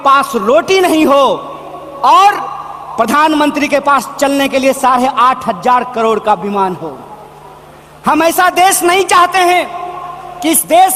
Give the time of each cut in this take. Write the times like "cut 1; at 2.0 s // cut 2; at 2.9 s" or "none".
none

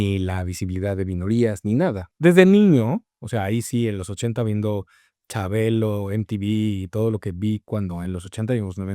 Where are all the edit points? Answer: cut 1; at 2.0 s

